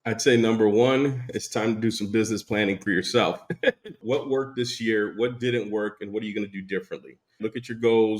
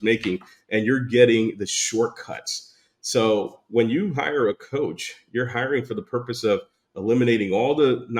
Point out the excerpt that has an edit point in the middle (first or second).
first